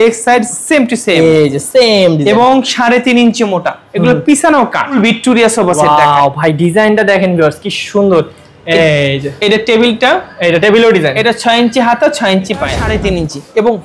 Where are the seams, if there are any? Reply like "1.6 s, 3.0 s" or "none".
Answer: 3.8 s, 4.9 s, 12.9 s